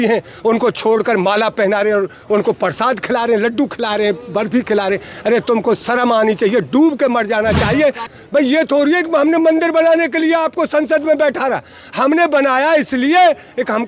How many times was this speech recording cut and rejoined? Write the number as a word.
one